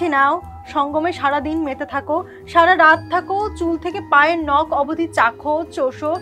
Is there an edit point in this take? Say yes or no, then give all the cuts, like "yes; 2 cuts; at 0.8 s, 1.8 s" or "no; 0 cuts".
no; 0 cuts